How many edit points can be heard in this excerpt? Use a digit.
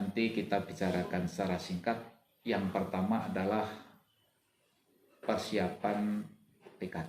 0